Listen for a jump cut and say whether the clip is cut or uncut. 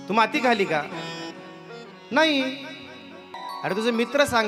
uncut